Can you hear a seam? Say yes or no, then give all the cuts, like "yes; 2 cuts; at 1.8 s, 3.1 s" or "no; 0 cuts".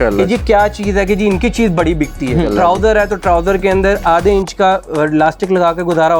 yes; 1 cut; at 2.5 s